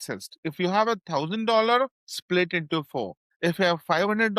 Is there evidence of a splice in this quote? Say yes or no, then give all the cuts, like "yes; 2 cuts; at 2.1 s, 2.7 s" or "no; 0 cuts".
yes; 2 cuts; at 2.1 s, 3.2 s